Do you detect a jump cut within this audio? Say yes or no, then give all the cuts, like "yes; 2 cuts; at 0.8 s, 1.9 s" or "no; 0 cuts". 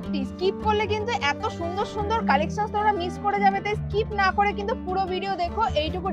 no; 0 cuts